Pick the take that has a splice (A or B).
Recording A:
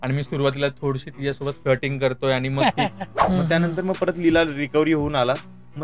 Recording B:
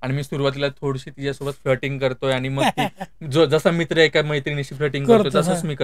A